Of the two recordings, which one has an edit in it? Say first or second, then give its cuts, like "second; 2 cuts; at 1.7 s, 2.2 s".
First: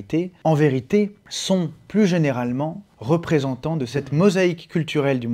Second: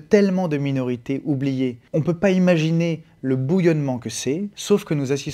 second; 1 cut; at 1.8 s